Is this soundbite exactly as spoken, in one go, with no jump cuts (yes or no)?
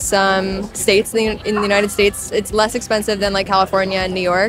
yes